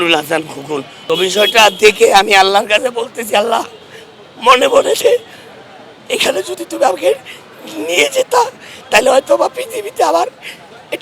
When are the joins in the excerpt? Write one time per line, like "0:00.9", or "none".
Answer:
0:00.9